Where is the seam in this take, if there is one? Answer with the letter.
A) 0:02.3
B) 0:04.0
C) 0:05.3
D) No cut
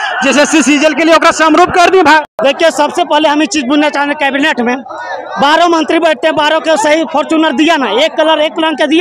A